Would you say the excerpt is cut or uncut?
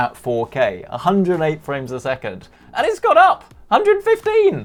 uncut